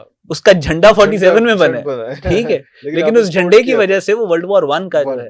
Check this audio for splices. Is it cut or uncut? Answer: uncut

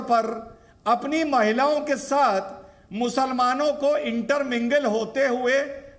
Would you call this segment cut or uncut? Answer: uncut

